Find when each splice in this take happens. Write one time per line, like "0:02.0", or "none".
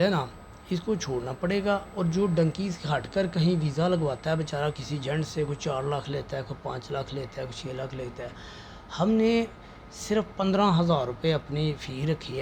none